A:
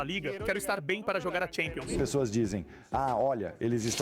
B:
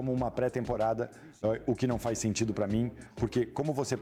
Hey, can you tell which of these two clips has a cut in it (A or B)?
A